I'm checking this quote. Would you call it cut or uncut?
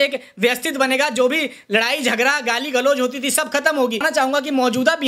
cut